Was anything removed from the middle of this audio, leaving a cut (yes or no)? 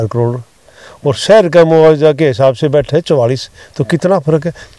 no